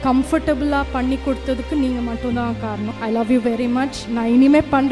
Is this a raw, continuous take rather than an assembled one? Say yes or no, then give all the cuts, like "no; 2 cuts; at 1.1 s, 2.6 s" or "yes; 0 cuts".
no; 2 cuts; at 2.9 s, 4.0 s